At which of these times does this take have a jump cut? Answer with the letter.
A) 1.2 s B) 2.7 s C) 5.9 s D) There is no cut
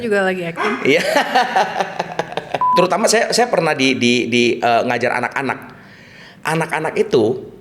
B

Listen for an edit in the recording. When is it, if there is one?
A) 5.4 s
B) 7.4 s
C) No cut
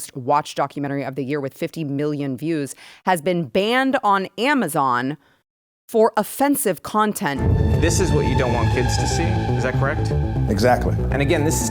B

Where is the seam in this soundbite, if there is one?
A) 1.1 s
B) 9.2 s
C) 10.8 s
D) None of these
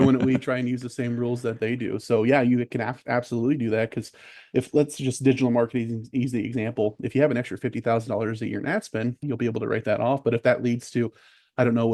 B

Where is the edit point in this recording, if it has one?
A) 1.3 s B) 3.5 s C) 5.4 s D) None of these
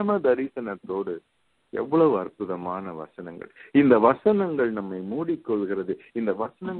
A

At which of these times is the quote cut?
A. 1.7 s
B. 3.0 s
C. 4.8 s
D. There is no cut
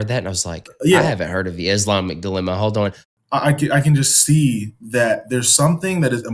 B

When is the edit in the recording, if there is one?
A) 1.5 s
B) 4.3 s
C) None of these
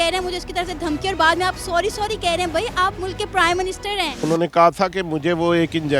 B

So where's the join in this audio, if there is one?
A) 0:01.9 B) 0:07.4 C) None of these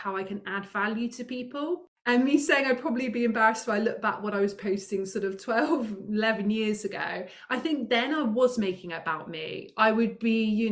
A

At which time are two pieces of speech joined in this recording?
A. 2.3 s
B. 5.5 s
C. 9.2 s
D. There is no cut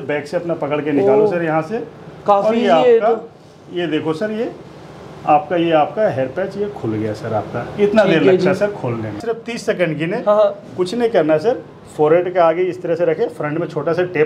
C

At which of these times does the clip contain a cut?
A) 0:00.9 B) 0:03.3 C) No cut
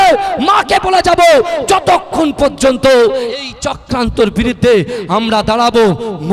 B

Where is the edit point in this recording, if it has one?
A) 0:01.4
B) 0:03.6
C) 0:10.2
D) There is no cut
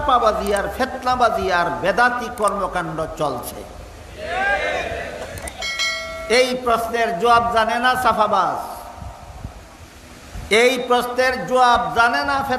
D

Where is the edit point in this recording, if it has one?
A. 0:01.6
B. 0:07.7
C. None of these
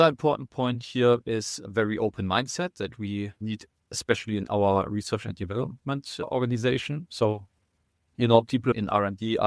A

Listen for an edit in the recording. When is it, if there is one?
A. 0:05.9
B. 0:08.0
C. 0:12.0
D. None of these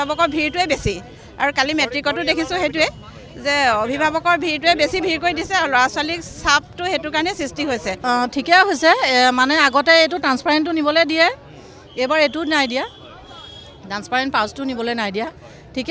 B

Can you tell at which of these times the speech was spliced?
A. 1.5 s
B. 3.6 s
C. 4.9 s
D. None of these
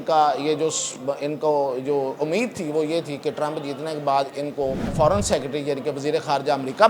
C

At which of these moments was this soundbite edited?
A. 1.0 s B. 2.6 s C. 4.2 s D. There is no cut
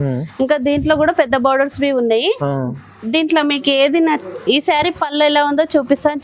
D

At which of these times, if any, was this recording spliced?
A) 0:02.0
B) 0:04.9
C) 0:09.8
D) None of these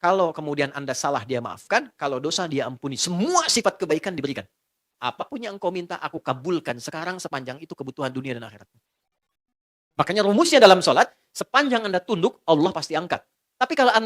B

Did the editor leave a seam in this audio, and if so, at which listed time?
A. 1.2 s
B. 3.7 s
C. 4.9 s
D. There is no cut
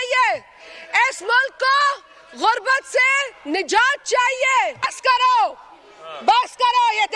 C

